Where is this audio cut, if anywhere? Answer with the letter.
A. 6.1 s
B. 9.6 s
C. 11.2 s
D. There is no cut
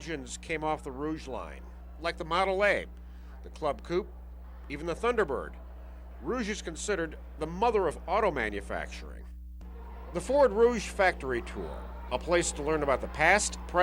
B